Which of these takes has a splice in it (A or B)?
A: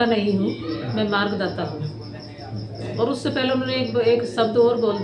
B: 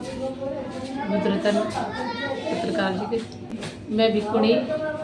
B